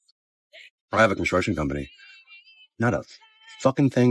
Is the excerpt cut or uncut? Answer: uncut